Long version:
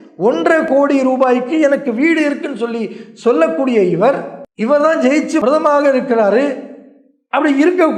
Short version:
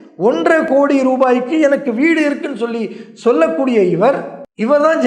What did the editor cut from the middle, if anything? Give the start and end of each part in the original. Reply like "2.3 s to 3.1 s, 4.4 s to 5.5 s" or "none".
none